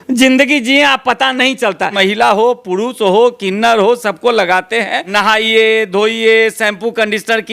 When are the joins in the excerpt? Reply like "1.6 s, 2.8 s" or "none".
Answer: 1.9 s, 5.0 s